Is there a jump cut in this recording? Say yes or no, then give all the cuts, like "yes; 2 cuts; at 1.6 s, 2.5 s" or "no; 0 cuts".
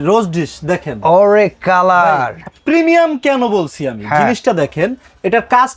no; 0 cuts